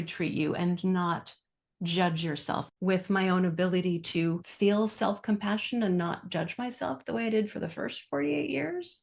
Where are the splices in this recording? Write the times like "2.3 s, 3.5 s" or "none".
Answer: 2.6 s, 4.5 s